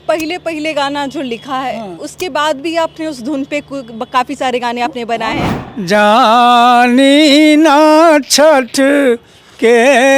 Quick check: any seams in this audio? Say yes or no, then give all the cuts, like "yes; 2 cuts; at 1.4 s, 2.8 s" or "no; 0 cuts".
yes; 1 cut; at 5.5 s